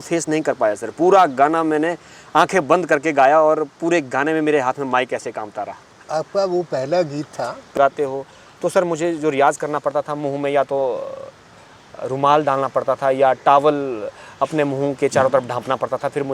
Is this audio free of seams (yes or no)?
no